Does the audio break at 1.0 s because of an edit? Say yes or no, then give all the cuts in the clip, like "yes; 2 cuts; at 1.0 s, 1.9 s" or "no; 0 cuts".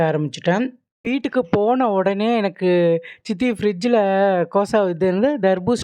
yes; 1 cut; at 1.0 s